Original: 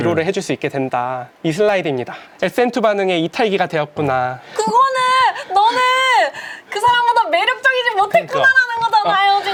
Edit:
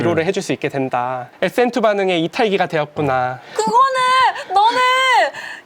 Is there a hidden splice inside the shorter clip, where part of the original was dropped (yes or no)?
yes